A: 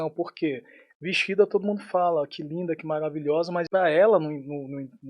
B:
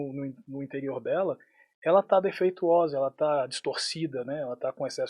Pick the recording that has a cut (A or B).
A